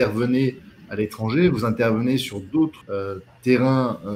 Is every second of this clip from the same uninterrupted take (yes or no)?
no